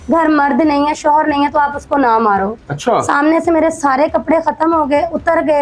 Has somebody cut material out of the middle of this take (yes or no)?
yes